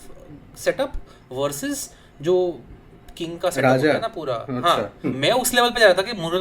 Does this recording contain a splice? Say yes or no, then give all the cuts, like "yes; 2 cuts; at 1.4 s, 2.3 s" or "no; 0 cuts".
yes; 1 cut; at 5.1 s